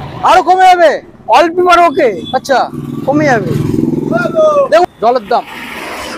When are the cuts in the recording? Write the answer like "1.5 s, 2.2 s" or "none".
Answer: 4.8 s